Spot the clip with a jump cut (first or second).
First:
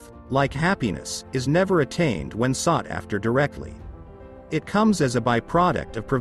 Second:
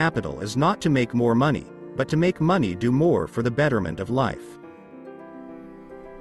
second